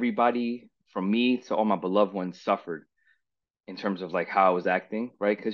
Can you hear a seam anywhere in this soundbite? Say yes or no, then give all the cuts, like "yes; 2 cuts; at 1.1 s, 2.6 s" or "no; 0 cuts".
no; 0 cuts